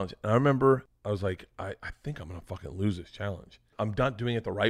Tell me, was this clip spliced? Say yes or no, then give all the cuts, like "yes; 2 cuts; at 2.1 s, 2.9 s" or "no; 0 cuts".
yes; 2 cuts; at 0.9 s, 3.7 s